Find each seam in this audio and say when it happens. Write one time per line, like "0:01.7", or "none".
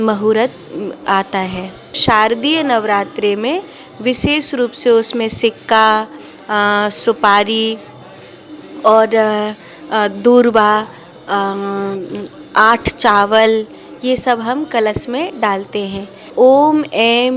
0:02.0
0:16.3